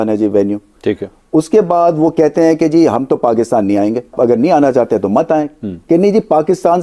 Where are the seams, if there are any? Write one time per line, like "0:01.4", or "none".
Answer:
0:04.1